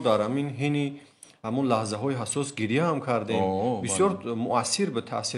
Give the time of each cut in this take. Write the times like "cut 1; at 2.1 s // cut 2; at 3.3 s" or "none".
none